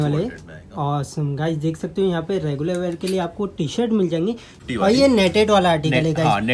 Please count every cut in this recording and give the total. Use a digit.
1